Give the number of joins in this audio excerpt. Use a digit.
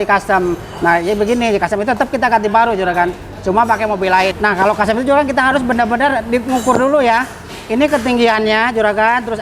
1